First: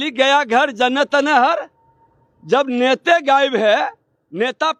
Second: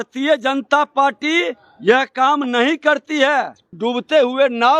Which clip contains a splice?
second; 1 cut; at 3.7 s

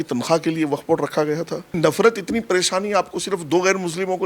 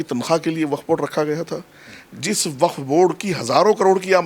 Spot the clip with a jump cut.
first; 1 cut; at 1.7 s

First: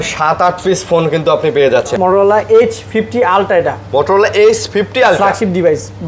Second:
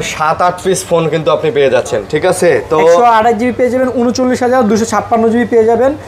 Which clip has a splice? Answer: first; 1 cut; at 1.9 s

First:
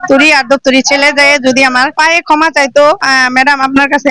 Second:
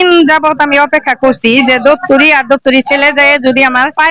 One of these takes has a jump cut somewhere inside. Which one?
first; 1 cut; at 3.0 s

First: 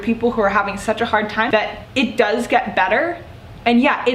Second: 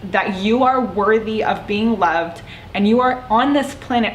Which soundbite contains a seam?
first; 1 cut; at 1.5 s

